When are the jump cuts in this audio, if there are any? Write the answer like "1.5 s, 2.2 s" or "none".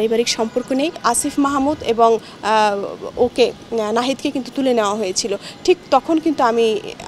1.0 s